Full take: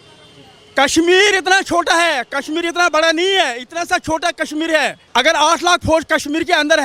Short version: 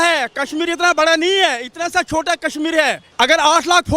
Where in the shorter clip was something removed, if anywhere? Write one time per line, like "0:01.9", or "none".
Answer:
none